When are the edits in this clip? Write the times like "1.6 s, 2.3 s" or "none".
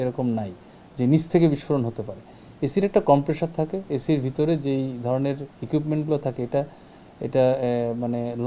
none